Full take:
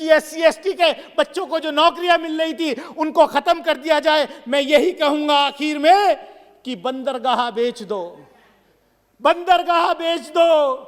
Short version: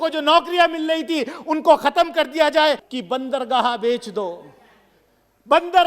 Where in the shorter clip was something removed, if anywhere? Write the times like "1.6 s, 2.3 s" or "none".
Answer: 2.9 s